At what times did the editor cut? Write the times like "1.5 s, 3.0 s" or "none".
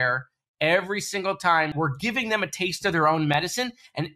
1.7 s